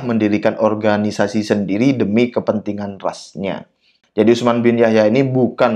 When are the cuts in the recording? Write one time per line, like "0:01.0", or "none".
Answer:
0:03.9